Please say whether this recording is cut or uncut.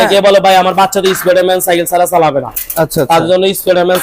uncut